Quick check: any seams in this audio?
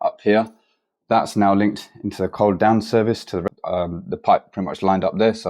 yes; 1 cut; at 3.4 s

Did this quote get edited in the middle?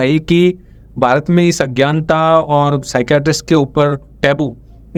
no; 0 cuts

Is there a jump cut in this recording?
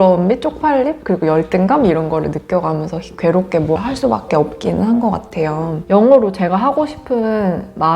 yes; 2 cuts; at 3.8 s, 5.8 s

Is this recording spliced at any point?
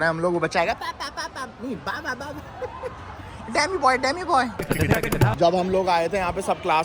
no; 0 cuts

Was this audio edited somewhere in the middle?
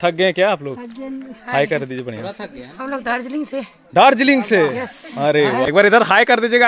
yes; 1 cut; at 5.7 s

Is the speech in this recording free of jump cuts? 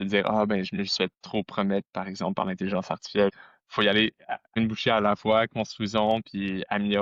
no; 2 cuts; at 3.3 s, 4.5 s

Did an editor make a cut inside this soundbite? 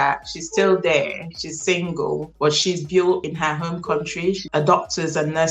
yes; 1 cut; at 4.4 s

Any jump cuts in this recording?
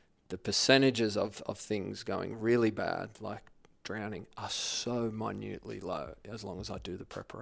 no; 0 cuts

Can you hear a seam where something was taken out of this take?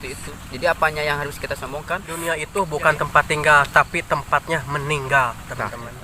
yes; 1 cut; at 2.1 s

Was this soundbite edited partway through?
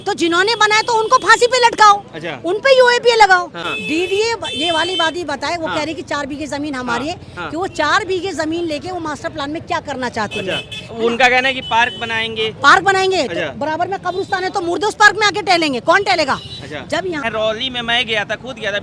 yes; 2 cuts; at 3.6 s, 17.2 s

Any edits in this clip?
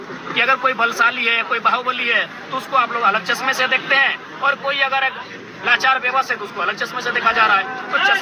no; 0 cuts

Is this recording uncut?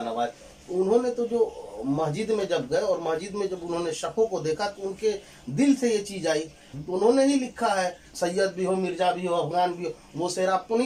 no; 2 cuts; at 6.6 s, 8.1 s

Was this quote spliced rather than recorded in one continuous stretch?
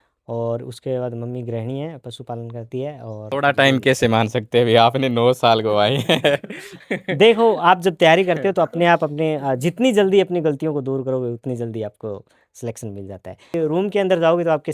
yes; 2 cuts; at 3.3 s, 13.5 s

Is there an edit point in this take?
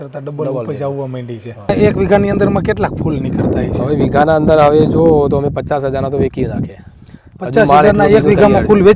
yes; 1 cut; at 1.7 s

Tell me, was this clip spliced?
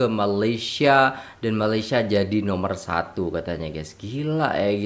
no; 0 cuts

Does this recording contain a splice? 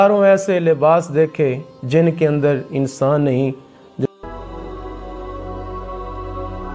yes; 1 cut; at 4.1 s

